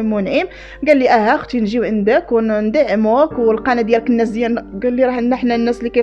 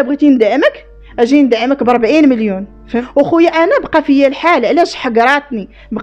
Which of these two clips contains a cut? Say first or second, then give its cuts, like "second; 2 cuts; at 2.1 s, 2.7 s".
second; 1 cut; at 3.0 s